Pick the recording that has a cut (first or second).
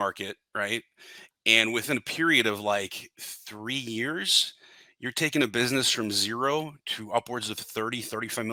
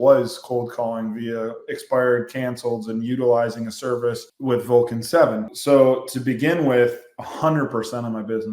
second